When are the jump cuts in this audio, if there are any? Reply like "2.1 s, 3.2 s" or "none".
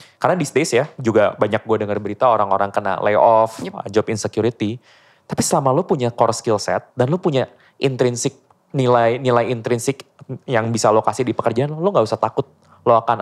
none